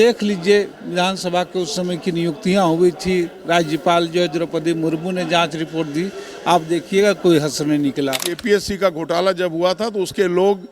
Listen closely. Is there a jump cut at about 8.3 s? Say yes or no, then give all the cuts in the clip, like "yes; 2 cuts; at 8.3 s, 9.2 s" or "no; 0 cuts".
yes; 1 cut; at 8.3 s